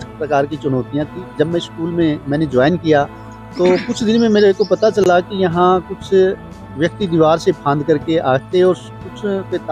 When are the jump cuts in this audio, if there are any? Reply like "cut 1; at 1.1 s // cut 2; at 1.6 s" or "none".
none